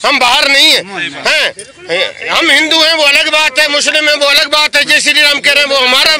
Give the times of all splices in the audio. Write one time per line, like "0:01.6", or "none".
none